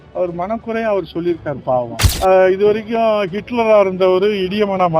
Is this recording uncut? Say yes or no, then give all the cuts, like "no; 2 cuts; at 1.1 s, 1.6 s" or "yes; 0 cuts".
no; 1 cut; at 2.0 s